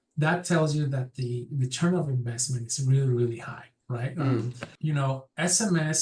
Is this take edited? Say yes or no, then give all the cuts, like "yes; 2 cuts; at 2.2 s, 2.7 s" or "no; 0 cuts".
yes; 1 cut; at 4.6 s